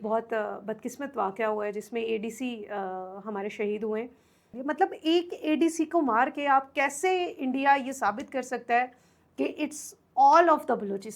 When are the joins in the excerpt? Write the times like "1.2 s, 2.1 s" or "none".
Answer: 4.5 s